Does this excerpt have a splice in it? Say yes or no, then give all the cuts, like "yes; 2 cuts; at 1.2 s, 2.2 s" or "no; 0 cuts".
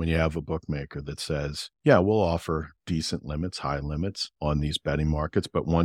yes; 3 cuts; at 1.6 s, 2.7 s, 4.3 s